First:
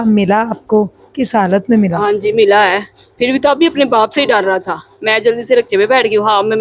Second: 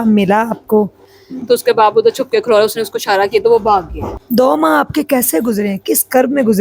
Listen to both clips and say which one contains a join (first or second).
second